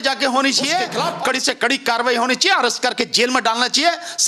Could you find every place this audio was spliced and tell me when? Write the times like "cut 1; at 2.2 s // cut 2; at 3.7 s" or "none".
cut 1; at 0.9 s